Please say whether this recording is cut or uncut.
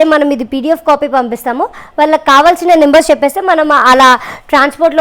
uncut